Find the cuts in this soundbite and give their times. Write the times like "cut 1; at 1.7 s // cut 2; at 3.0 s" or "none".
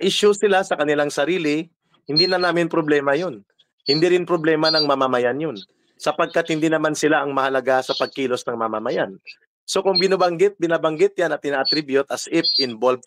none